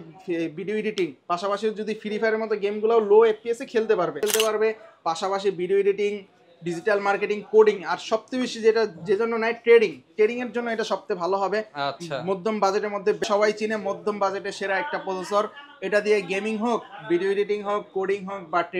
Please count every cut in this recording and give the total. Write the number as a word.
two